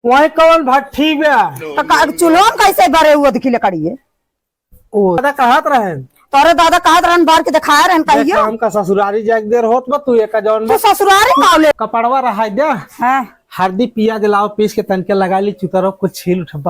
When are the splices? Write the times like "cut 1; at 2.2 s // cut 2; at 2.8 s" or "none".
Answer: cut 1; at 11.7 s